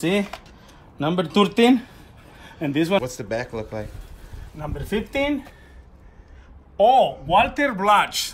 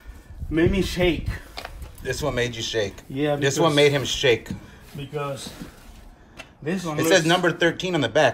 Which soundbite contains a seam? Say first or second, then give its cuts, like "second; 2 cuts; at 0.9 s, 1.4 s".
first; 1 cut; at 3.0 s